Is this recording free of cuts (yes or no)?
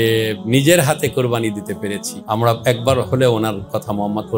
no